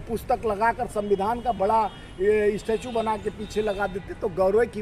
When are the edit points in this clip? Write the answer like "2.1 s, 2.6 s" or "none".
none